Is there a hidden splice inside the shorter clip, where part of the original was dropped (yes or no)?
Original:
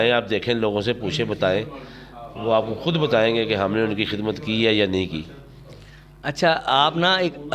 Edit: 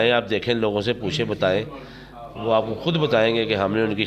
no